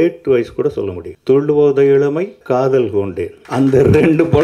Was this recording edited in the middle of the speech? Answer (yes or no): yes